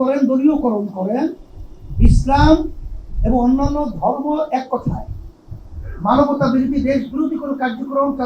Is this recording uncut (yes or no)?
yes